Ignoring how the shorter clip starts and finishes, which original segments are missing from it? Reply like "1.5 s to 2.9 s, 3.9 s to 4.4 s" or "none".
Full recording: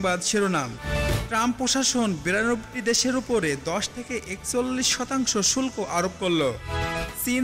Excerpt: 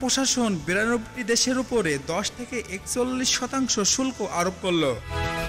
none